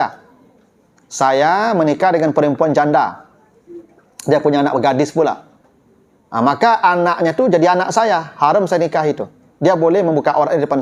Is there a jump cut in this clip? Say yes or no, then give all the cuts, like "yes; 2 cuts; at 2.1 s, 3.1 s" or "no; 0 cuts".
no; 0 cuts